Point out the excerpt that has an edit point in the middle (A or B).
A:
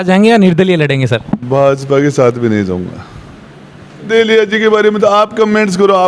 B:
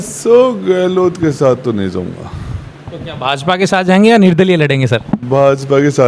A